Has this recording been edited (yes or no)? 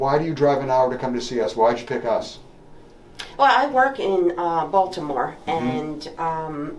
no